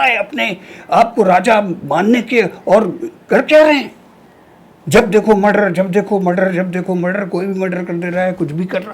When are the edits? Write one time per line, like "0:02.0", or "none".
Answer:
none